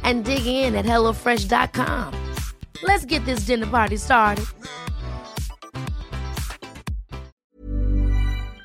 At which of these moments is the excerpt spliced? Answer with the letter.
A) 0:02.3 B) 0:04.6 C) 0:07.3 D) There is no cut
C